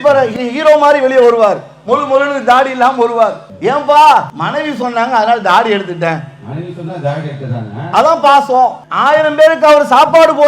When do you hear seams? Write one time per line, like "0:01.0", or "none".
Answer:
0:03.5
0:04.4
0:08.9